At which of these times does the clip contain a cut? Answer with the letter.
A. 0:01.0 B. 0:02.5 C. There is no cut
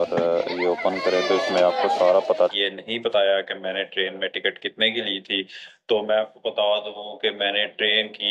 B